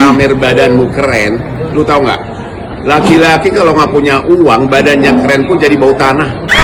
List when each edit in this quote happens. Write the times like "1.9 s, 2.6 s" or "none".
none